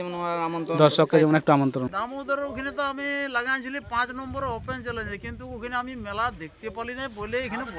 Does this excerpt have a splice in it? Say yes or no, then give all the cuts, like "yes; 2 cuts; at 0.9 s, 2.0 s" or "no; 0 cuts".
yes; 1 cut; at 1.9 s